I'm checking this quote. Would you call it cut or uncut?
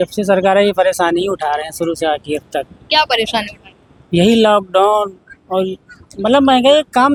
uncut